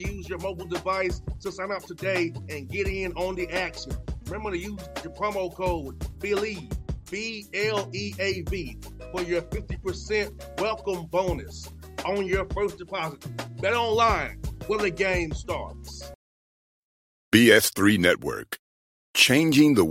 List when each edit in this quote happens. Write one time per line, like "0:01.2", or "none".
0:16.1